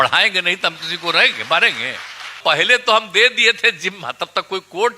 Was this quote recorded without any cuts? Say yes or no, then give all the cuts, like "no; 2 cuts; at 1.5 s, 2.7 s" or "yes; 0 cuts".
no; 1 cut; at 2.4 s